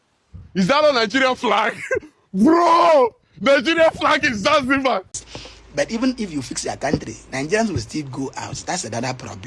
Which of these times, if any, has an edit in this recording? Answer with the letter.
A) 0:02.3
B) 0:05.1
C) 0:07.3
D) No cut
B